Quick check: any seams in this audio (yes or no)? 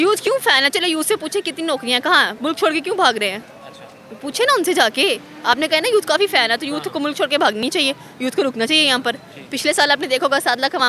no